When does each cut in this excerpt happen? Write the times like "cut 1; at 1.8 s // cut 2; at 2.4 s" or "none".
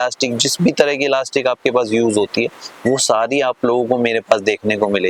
none